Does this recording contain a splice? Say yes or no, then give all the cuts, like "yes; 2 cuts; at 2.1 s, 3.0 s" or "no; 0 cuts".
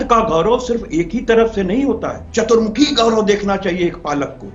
no; 0 cuts